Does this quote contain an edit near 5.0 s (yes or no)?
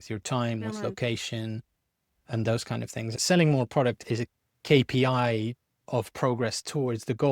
no